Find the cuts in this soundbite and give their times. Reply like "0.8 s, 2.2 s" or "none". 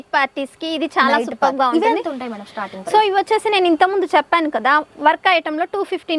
none